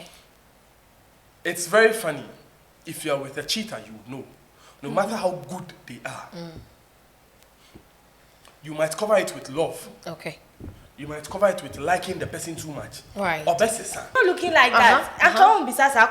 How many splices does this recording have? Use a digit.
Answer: 1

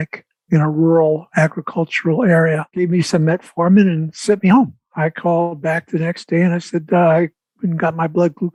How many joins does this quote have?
0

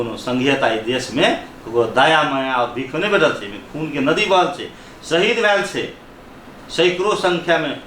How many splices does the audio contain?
0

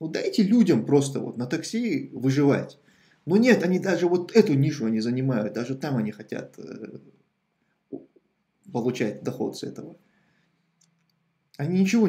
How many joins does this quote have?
0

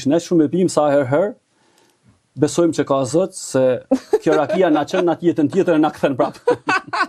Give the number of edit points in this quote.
0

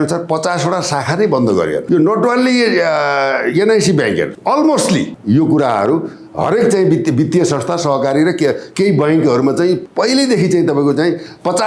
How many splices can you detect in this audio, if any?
4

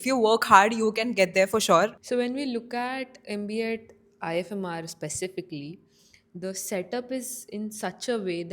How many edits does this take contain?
1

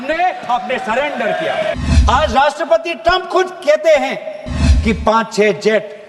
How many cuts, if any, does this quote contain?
1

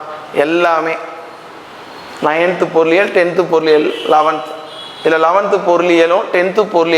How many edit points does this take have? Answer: 0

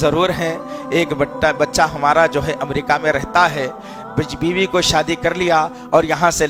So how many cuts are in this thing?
0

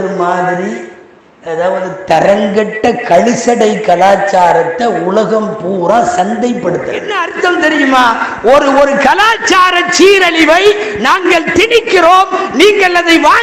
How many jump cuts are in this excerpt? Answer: 1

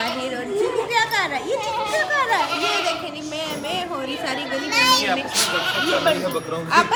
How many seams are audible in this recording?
0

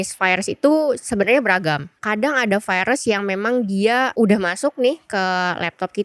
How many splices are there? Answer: 2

